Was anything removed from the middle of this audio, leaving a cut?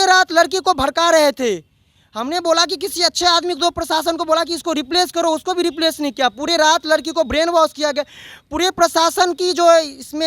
no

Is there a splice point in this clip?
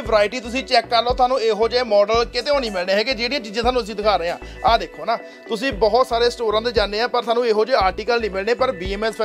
no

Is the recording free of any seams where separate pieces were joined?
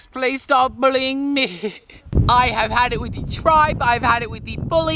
yes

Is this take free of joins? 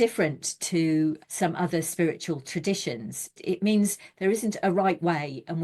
no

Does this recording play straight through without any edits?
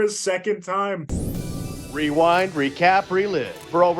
no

